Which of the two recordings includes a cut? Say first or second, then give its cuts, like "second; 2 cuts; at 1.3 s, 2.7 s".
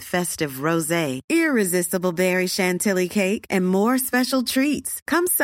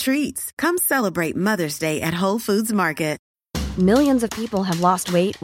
second; 1 cut; at 3.3 s